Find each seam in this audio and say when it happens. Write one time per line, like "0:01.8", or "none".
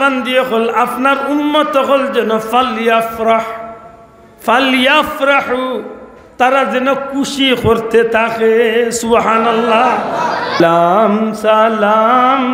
0:10.6